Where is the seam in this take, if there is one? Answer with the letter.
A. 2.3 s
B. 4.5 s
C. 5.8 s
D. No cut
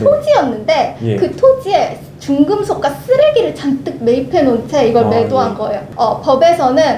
C